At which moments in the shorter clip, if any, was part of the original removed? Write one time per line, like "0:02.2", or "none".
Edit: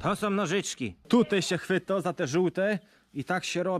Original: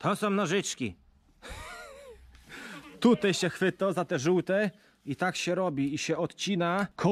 0:01.0